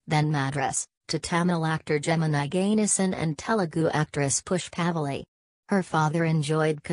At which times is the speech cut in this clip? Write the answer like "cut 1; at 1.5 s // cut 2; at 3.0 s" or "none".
cut 1; at 3.3 s